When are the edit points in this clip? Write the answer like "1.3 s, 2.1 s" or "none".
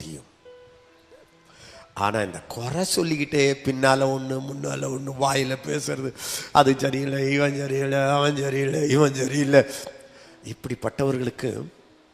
none